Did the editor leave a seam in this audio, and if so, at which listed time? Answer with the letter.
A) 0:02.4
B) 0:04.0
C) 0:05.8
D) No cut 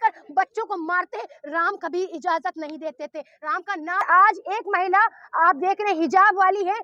B